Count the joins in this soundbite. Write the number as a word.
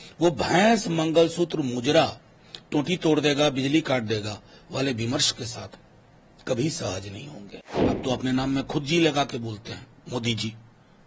one